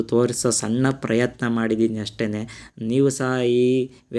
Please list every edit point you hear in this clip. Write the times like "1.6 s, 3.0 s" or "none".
none